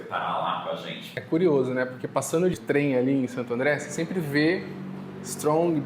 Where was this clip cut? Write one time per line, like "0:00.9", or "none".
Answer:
0:01.1
0:02.5